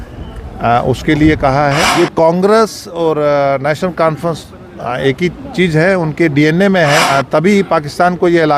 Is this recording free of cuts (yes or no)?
no